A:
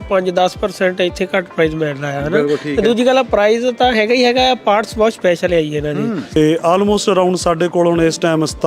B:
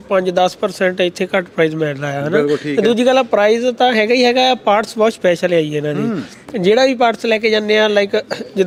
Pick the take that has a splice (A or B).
A